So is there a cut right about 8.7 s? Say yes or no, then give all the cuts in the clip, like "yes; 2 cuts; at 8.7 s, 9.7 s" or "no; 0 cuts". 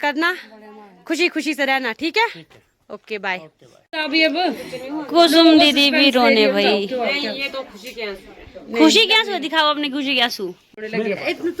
no; 2 cuts; at 3.9 s, 10.6 s